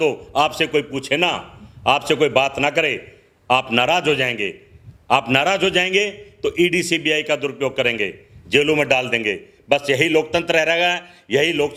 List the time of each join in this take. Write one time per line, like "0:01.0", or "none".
none